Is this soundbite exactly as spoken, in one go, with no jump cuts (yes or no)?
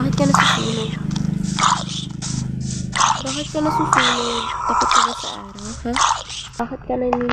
no